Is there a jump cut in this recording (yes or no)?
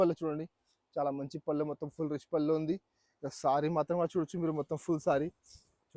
no